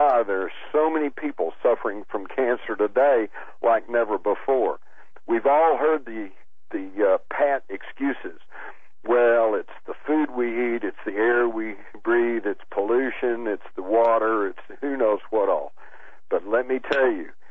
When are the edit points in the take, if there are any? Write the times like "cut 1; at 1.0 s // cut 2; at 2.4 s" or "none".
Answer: none